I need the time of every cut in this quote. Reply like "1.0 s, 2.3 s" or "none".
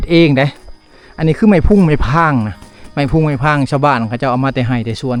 none